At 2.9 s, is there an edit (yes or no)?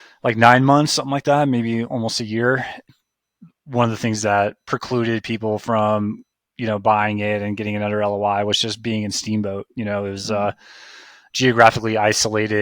yes